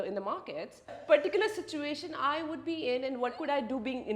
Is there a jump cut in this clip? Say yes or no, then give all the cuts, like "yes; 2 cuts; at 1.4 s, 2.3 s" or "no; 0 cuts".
yes; 1 cut; at 1.0 s